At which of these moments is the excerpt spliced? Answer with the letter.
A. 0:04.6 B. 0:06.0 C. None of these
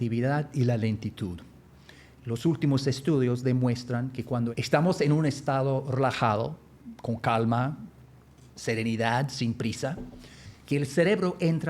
A